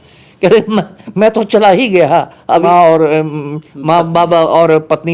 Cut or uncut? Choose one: cut